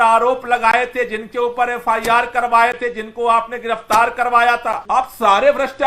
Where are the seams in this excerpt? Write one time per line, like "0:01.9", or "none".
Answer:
0:04.8